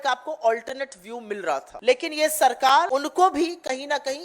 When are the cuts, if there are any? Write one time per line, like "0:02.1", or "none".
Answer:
0:01.7
0:02.9